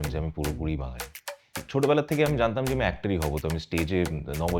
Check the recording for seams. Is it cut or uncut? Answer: cut